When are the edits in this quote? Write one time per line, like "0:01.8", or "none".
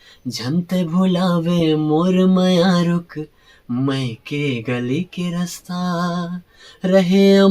none